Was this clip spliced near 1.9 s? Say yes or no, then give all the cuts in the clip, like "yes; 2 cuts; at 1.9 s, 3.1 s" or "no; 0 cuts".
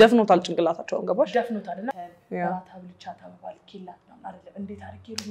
yes; 1 cut; at 1.9 s